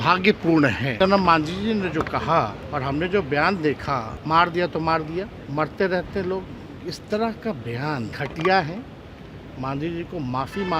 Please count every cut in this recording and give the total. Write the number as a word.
five